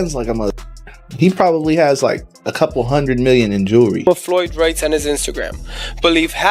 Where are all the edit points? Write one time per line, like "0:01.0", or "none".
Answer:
0:04.1